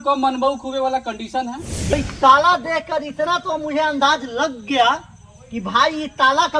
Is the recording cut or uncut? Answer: cut